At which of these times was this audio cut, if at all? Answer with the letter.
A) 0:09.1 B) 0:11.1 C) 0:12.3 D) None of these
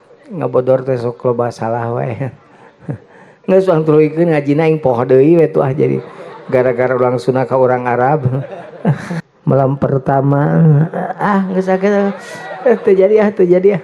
A